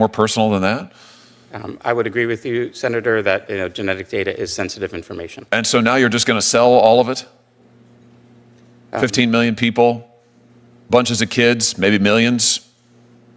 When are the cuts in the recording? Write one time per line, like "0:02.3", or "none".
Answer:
none